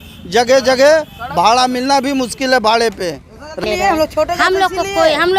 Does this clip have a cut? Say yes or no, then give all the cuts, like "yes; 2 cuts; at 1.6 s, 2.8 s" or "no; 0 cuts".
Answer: yes; 1 cut; at 3.6 s